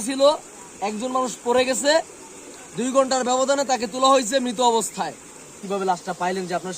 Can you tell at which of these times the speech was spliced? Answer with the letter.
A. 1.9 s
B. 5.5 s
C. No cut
B